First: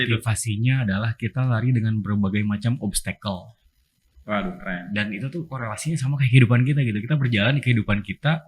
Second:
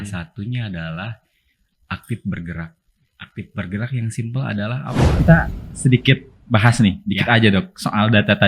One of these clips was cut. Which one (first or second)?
second